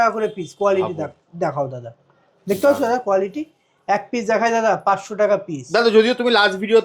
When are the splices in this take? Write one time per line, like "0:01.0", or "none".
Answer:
none